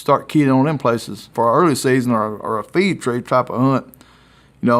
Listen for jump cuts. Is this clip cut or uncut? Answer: cut